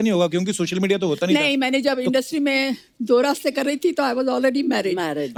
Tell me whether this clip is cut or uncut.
uncut